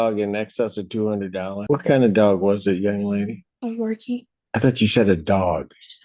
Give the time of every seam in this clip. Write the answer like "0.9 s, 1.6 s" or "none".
1.6 s, 4.4 s